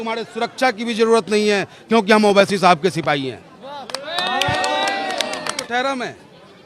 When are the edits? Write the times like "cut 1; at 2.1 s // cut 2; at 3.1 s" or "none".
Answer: cut 1; at 5.7 s